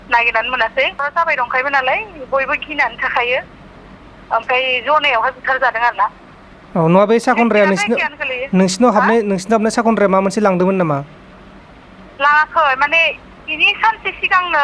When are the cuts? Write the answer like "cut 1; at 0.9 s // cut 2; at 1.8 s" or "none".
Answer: cut 1; at 1.0 s